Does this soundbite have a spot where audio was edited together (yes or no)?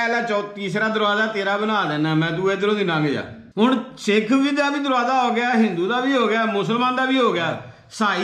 yes